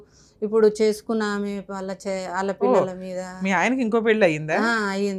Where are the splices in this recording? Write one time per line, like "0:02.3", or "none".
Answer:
none